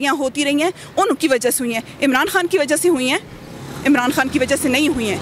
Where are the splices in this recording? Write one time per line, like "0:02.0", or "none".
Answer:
none